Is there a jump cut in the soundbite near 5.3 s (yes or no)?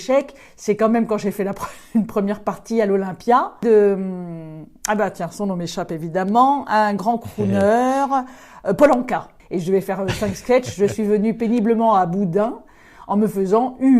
no